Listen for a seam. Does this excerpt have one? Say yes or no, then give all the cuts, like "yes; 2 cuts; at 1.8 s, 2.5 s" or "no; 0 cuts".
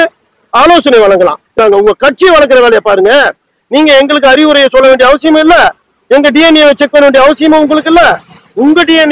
yes; 1 cut; at 1.5 s